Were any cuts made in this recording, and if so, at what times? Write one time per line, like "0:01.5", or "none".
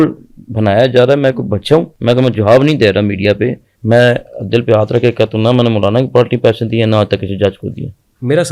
0:01.9
0:03.7